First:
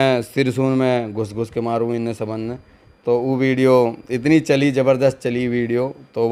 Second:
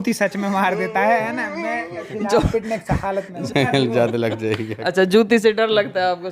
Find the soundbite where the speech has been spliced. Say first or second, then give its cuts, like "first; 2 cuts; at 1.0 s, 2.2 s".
second; 1 cut; at 3.4 s